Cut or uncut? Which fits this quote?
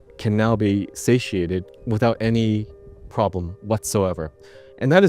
cut